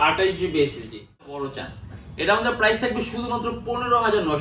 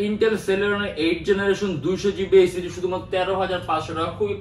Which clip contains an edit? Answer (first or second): first